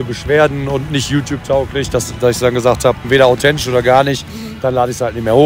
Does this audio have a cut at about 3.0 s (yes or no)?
yes